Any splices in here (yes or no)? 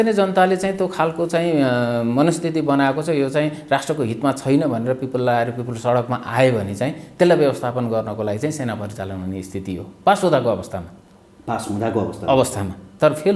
no